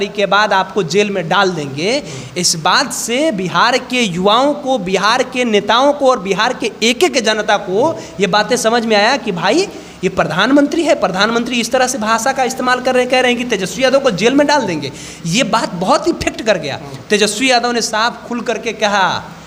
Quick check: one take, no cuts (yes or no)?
yes